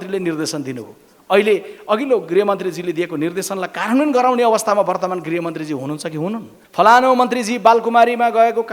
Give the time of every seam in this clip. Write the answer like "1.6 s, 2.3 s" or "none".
6.6 s